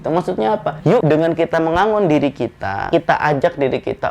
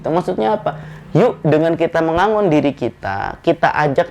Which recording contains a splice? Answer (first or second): first